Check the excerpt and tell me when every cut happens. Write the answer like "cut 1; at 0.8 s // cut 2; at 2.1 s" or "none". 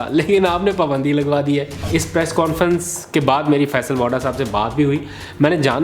cut 1; at 1.8 s